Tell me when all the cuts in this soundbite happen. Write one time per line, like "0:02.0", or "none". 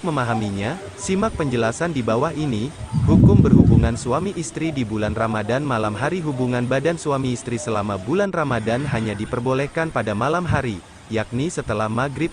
0:02.9
0:03.8